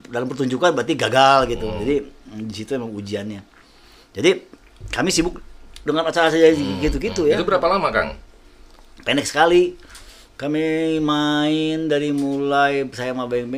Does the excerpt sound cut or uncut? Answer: uncut